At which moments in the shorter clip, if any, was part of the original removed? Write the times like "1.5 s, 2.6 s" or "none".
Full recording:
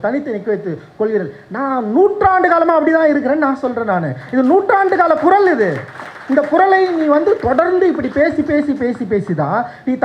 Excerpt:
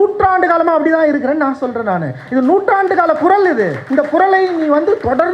3.8 s